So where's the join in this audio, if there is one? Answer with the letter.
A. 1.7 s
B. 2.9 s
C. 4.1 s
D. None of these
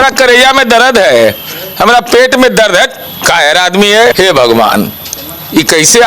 C